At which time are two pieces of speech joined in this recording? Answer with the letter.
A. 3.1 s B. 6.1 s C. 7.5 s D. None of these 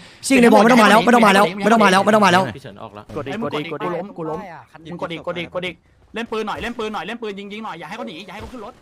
A